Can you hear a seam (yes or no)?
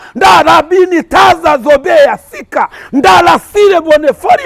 no